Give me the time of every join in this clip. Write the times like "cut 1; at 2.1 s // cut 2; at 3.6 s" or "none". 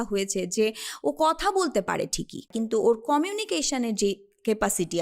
cut 1; at 2.5 s